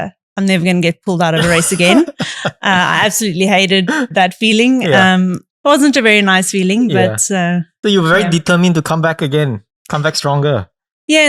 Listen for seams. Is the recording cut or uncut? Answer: cut